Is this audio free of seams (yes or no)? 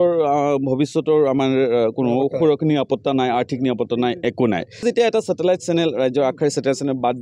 no